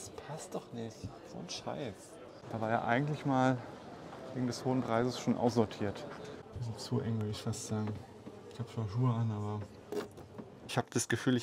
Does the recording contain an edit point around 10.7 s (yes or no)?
yes